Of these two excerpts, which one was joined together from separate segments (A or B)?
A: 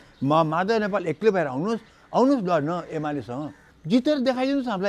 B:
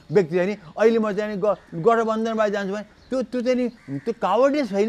A